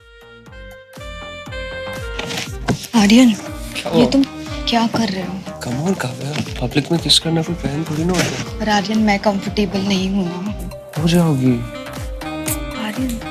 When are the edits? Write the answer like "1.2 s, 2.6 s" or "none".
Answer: 1.3 s, 1.8 s